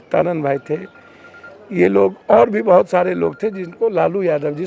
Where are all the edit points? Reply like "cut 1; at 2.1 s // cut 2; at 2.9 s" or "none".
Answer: none